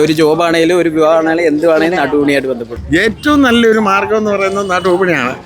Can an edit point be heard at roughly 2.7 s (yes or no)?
yes